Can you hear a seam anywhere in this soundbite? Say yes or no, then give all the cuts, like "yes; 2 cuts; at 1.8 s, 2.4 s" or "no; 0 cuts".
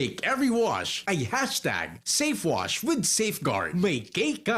yes; 1 cut; at 3.7 s